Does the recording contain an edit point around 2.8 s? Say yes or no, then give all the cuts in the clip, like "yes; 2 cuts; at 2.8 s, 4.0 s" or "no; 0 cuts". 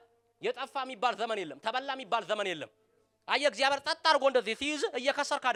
no; 0 cuts